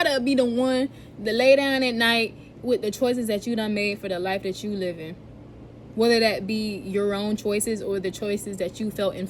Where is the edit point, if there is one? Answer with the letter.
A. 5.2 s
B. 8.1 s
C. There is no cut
C